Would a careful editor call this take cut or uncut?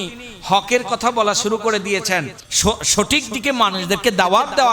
cut